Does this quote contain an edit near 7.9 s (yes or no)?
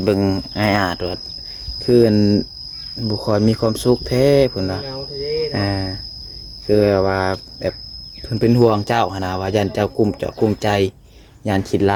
no